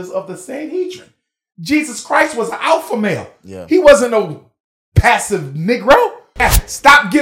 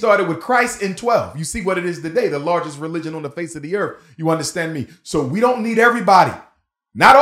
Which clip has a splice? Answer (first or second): first